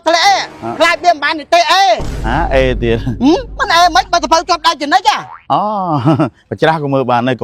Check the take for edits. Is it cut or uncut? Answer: uncut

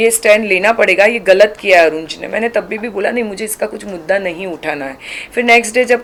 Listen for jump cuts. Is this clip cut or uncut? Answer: uncut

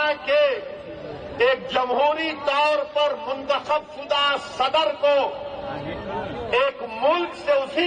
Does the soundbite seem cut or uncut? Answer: uncut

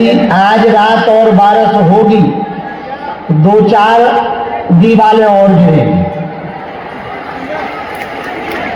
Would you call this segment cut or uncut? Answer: uncut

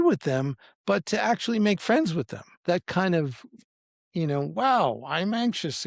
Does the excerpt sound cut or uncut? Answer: cut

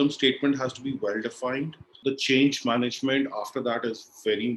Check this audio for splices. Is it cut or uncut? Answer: cut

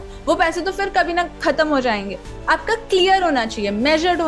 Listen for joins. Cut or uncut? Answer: cut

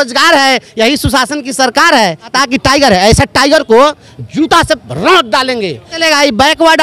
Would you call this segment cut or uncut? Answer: cut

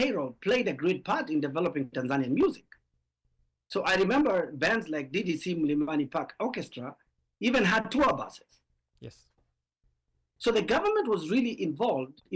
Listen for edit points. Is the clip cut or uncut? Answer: uncut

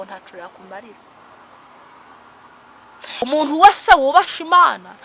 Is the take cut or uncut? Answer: cut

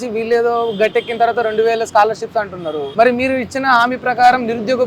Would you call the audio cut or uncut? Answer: cut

